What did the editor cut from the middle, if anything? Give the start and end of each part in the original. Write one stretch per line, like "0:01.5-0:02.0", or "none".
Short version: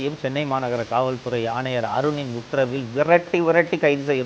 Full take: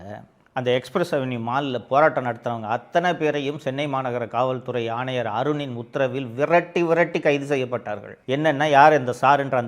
none